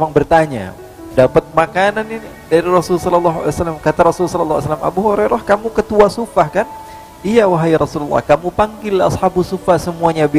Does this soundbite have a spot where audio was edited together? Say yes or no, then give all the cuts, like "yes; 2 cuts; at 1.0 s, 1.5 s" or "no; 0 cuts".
yes; 1 cut; at 1.0 s